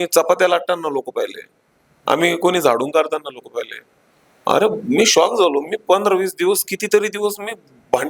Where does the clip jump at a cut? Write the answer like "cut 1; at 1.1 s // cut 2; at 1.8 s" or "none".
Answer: none